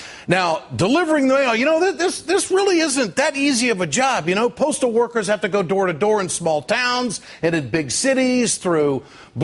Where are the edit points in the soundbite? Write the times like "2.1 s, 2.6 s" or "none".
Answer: 4.1 s

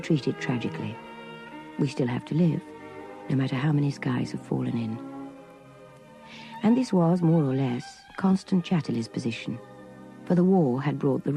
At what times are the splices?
none

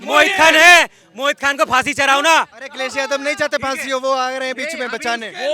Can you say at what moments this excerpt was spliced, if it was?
none

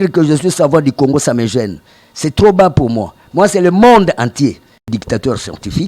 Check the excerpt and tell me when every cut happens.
4.9 s

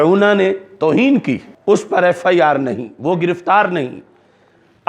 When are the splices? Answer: 1.5 s

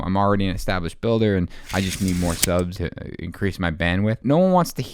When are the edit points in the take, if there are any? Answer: 2.8 s, 4.2 s

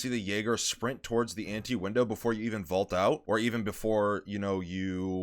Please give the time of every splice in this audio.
3.2 s

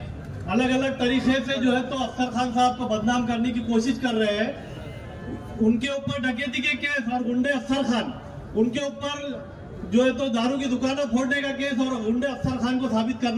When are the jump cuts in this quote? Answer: none

